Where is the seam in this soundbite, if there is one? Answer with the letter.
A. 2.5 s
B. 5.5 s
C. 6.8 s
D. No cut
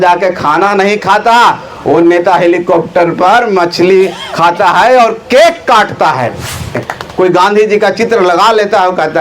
C